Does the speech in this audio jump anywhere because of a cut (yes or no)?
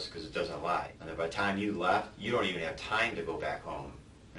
yes